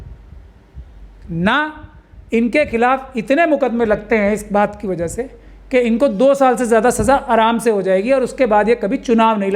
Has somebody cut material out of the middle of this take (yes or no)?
no